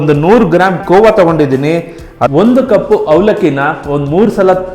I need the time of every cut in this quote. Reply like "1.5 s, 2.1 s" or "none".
2.3 s